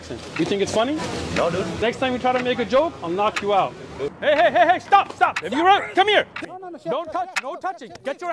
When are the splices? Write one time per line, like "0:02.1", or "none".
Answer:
0:01.8
0:04.1
0:06.4